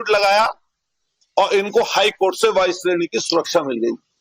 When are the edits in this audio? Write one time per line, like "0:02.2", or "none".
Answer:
0:02.1